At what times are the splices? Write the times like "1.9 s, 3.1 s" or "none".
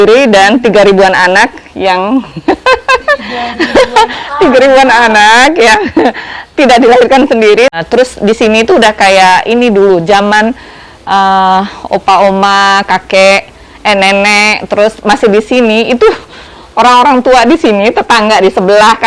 7.7 s